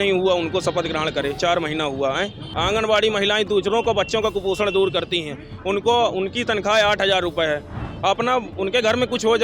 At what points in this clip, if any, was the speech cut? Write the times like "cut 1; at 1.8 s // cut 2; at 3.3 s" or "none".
cut 1; at 2.4 s // cut 2; at 7.8 s